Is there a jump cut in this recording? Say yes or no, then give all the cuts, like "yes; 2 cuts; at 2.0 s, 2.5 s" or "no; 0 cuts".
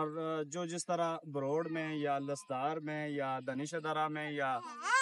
no; 0 cuts